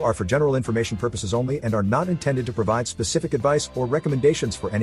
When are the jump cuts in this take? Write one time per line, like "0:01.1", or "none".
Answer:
none